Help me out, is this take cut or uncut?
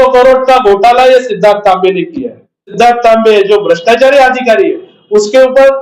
cut